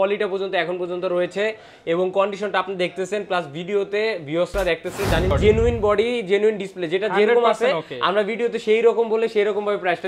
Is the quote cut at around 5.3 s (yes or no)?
yes